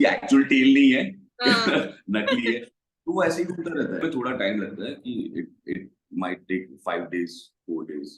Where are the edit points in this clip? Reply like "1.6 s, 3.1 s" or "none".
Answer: 4.0 s